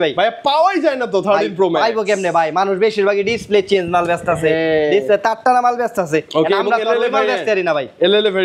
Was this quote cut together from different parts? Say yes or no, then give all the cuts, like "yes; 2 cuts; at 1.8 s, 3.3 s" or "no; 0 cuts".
no; 0 cuts